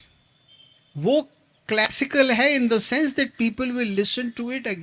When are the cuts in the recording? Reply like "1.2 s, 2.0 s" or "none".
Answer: none